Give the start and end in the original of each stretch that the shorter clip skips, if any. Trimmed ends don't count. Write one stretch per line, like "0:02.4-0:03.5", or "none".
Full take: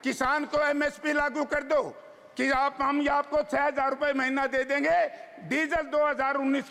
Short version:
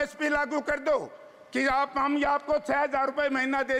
none